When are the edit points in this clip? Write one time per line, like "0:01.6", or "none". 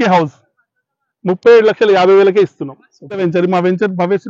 0:03.2